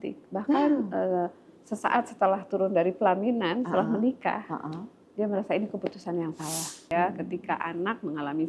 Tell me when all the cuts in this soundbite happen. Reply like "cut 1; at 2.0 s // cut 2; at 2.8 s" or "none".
cut 1; at 6.8 s